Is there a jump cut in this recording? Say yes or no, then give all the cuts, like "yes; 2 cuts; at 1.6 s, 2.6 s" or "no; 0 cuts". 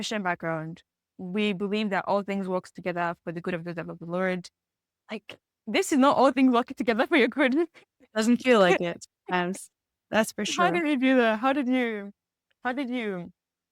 yes; 1 cut; at 1.1 s